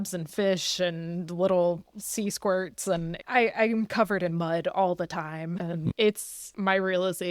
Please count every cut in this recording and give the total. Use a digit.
2